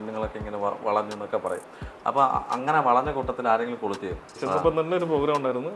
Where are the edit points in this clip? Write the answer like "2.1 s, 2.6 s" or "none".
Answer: 4.3 s